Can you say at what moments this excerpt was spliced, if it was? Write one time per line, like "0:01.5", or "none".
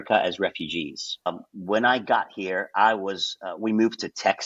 0:01.3

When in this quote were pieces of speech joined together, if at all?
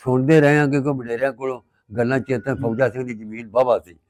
none

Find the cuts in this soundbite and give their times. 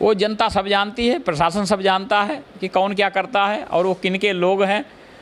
none

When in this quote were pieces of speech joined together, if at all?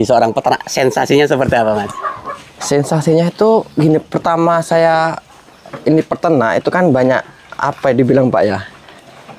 none

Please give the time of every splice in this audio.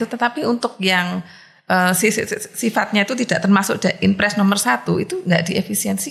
none

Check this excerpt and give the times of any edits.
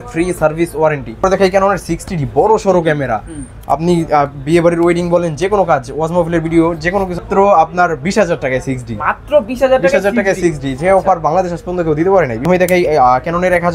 0:01.2
0:07.2
0:12.4

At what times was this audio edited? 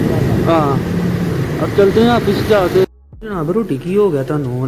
0:02.9

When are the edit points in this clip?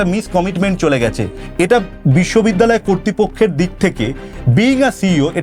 0:01.3

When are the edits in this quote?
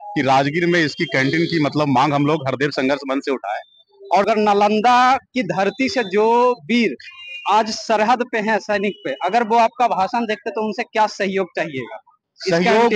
0:04.3

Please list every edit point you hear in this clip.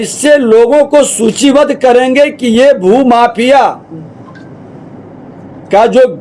none

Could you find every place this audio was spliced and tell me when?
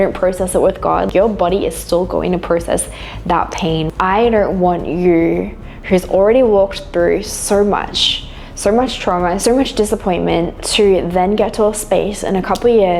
0:01.1
0:03.8

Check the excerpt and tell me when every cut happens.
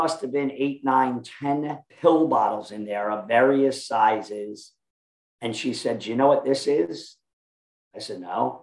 0:01.8

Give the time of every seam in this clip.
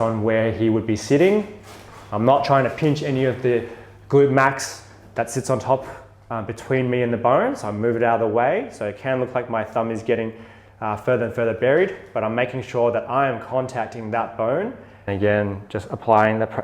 0:15.1

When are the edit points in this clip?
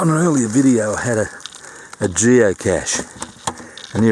none

